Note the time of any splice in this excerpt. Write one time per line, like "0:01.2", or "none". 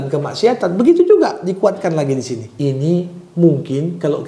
0:02.4